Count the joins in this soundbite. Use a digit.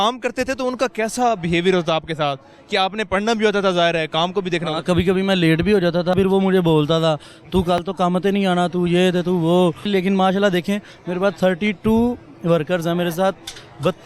2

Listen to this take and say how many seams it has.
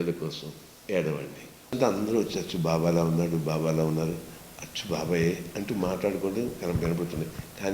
1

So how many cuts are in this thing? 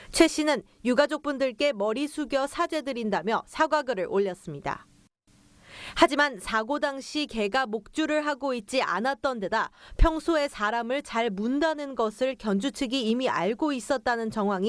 1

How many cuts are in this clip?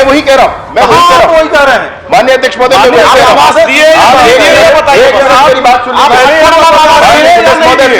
0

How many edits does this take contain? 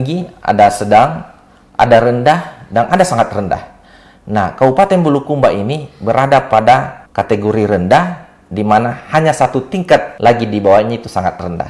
1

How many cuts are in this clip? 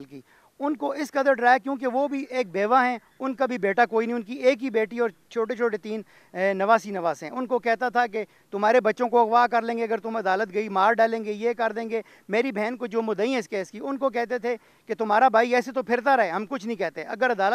0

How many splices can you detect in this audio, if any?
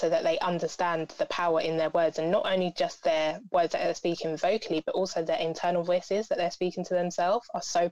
0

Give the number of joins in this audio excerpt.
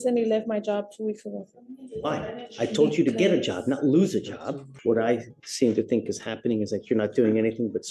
1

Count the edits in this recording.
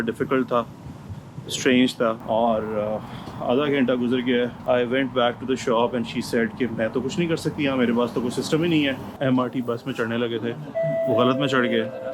2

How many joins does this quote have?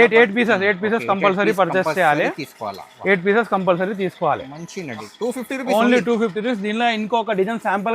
1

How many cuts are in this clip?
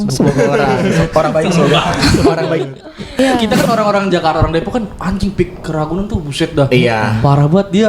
1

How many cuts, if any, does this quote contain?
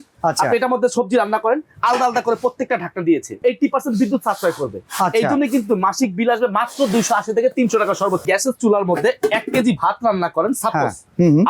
2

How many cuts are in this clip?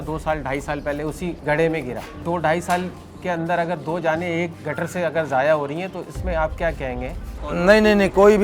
4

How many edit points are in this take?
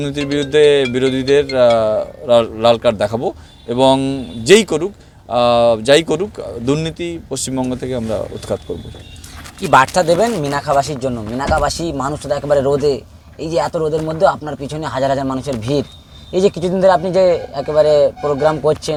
0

